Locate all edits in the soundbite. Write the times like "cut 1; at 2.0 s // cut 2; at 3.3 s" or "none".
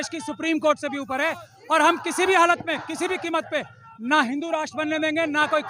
none